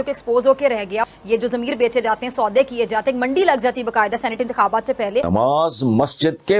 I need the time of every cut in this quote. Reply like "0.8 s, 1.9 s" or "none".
5.3 s